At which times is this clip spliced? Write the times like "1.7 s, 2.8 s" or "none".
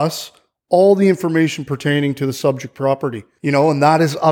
3.3 s